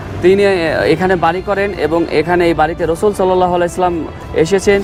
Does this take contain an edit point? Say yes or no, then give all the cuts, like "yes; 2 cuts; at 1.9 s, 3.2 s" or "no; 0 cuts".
no; 0 cuts